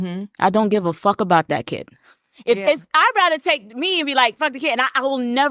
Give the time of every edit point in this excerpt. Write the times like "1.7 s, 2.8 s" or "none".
2.3 s